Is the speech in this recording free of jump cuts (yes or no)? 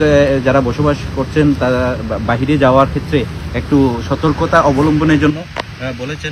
yes